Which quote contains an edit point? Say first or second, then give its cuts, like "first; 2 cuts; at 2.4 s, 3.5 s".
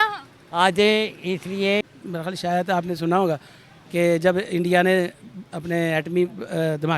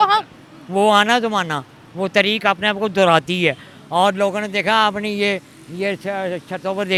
first; 1 cut; at 1.9 s